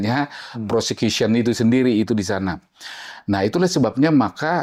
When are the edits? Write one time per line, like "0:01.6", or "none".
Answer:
none